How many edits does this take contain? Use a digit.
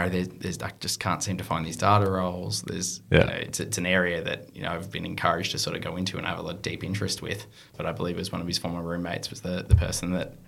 1